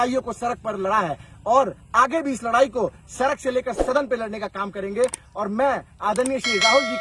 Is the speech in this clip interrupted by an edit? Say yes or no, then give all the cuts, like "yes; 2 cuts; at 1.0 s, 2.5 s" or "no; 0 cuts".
no; 0 cuts